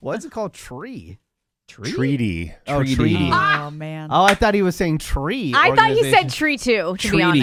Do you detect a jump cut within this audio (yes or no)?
no